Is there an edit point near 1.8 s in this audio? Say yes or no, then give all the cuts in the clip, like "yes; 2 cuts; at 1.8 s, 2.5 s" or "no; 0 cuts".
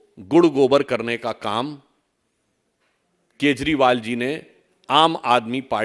no; 0 cuts